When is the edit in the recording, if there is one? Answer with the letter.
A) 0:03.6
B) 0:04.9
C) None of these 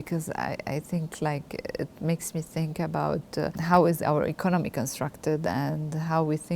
A